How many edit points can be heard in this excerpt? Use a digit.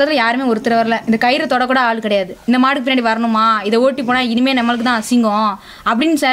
0